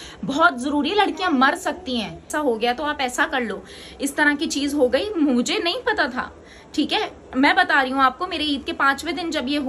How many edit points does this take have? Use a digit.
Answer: 1